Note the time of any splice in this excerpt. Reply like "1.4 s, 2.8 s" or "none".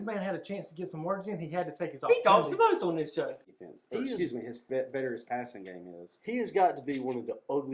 3.4 s